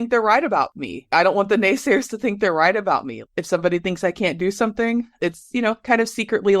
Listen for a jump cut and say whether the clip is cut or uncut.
cut